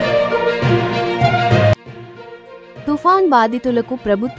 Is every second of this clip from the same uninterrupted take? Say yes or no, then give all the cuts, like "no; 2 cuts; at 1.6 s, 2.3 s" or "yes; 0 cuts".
yes; 0 cuts